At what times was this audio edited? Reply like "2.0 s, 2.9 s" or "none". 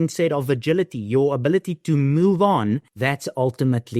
3.0 s